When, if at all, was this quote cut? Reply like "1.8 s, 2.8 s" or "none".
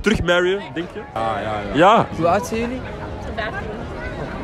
1.1 s, 2.1 s